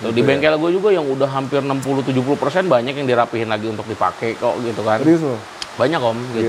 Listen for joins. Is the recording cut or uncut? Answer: uncut